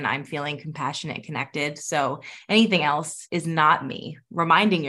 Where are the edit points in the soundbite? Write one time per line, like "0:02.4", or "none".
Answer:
0:03.2

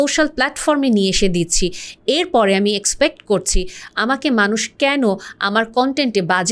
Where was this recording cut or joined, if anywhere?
none

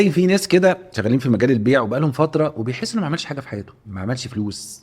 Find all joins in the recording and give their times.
0:00.9
0:03.8

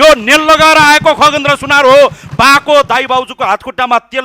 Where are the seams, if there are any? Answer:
none

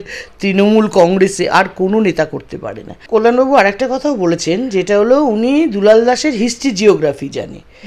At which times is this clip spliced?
0:03.0

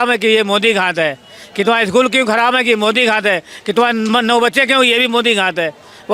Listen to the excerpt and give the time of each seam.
none

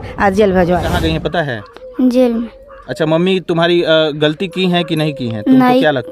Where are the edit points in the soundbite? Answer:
0:00.9

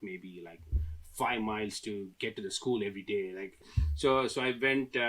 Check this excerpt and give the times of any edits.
0:03.7

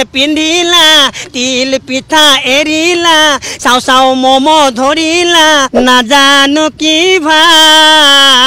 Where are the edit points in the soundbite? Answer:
0:05.7

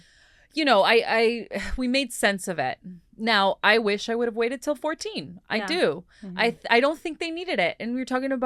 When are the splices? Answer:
none

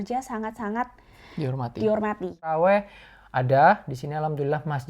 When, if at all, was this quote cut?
0:02.5

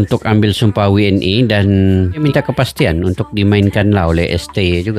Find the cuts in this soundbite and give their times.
0:02.2

